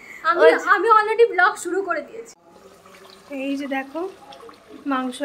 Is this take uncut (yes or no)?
no